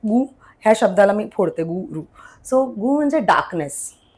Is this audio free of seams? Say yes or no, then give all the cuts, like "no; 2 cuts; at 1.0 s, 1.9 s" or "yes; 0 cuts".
yes; 0 cuts